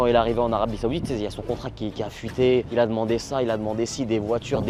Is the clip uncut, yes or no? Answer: yes